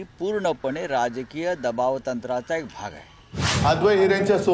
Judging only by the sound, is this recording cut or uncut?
cut